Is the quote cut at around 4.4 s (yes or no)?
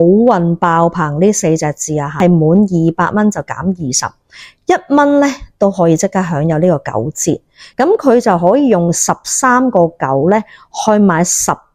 no